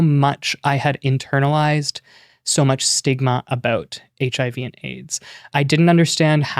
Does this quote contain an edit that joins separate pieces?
yes; 1 cut; at 5.5 s

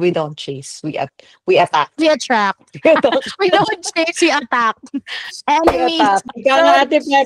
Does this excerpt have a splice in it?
yes; 1 cut; at 6.3 s

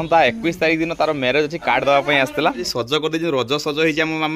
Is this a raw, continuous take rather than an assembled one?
no; 1 cut; at 2.7 s

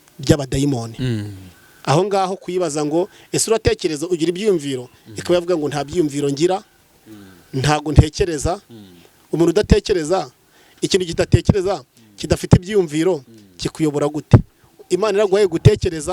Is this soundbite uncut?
yes; 0 cuts

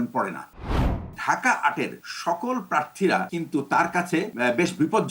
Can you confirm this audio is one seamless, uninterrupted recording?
no; 4 cuts; at 0.9 s, 2.0 s, 3.3 s, 4.3 s

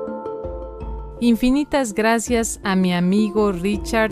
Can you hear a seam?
yes; 1 cut; at 1.1 s

